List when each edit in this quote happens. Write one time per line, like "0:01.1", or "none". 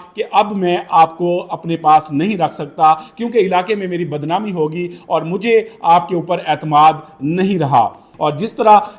0:08.1